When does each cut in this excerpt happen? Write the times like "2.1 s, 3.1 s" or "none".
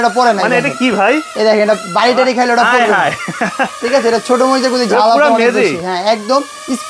none